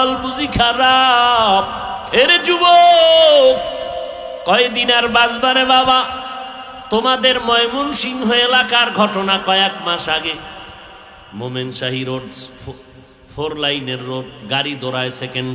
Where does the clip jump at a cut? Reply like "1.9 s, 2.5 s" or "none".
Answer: 1.9 s